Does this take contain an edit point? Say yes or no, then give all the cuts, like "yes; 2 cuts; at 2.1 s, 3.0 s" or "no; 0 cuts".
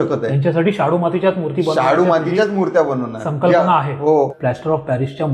yes; 1 cut; at 4.3 s